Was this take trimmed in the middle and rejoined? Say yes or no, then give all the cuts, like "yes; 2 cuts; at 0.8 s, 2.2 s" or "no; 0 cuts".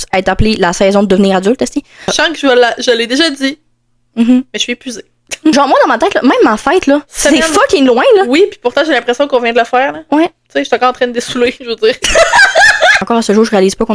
yes; 3 cuts; at 2.0 s, 5.5 s, 13.0 s